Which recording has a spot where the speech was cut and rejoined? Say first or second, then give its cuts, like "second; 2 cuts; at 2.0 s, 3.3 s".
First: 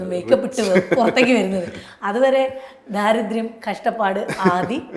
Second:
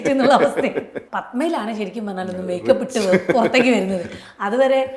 second; 1 cut; at 1.0 s